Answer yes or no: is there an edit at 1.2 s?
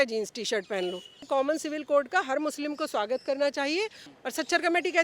yes